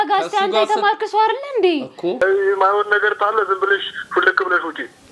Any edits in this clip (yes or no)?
yes